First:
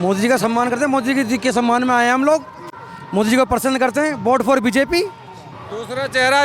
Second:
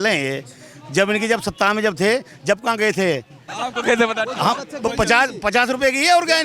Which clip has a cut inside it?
second; 1 cut; at 3.4 s

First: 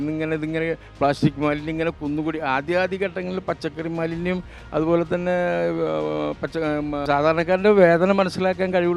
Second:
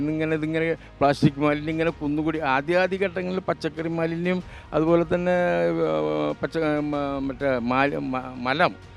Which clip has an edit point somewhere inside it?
first; 1 cut; at 7.0 s

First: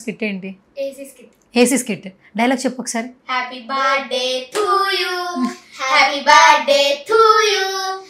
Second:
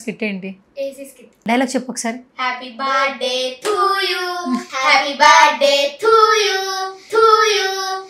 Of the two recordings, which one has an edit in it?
second; 2 cuts; at 1.2 s, 4.7 s

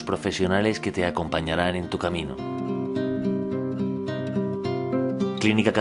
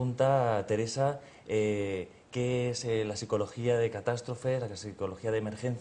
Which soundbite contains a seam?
second; 1 cut; at 2.6 s

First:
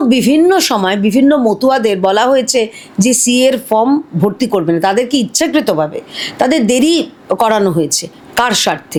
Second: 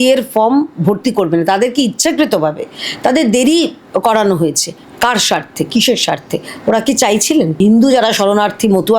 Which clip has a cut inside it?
second; 1 cut; at 7.6 s

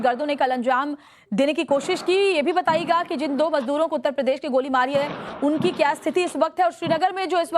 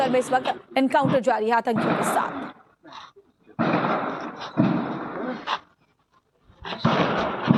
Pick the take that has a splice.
first; 1 cut; at 1.4 s

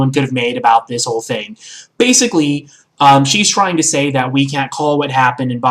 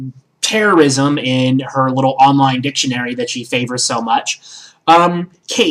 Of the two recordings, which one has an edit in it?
first; 1 cut; at 0.9 s

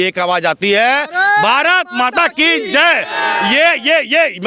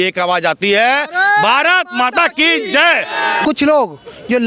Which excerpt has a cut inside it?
second; 1 cut; at 3.4 s

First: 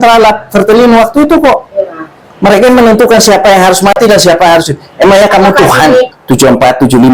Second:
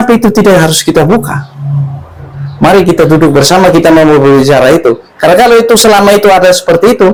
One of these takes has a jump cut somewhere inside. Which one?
first; 1 cut; at 6.1 s

